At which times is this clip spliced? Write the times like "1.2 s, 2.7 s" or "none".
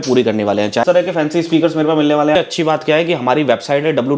0.8 s, 2.4 s